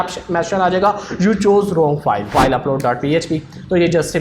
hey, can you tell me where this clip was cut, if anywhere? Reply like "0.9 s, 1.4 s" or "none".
2.3 s